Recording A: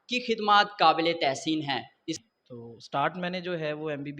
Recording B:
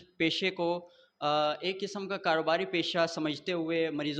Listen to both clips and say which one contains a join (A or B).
A